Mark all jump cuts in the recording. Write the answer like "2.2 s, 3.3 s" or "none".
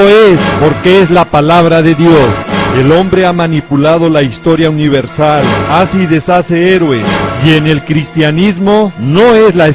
3.9 s